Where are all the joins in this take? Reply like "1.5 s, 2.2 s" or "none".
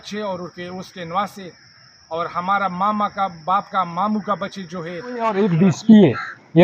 5.2 s